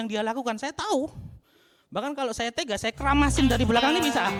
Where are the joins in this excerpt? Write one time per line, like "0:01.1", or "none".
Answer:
none